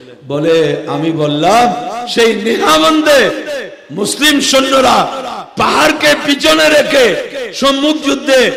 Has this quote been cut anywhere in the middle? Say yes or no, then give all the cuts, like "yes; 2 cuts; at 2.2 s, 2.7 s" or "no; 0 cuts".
no; 0 cuts